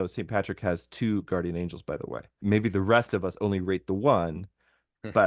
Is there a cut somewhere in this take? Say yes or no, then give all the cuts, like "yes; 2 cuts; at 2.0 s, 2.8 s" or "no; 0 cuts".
yes; 1 cut; at 2.4 s